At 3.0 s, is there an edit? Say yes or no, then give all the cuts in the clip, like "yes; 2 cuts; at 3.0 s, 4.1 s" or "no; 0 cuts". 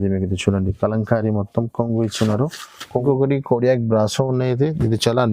yes; 1 cut; at 3.0 s